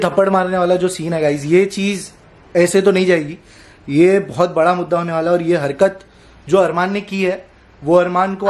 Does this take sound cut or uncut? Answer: uncut